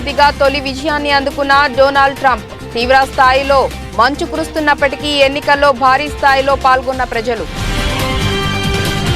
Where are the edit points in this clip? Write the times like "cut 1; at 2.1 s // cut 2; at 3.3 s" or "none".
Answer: cut 1; at 7.5 s